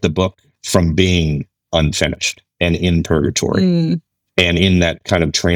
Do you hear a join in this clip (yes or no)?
no